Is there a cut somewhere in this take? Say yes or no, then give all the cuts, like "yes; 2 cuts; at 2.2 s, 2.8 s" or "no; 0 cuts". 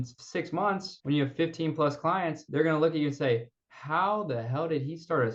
yes; 2 cuts; at 0.9 s, 2.4 s